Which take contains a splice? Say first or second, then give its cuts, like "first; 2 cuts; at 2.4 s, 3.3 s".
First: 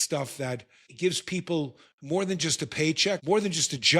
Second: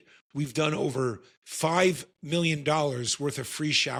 first; 2 cuts; at 0.9 s, 3.2 s